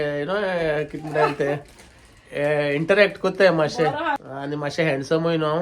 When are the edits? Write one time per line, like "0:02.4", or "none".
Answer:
0:04.2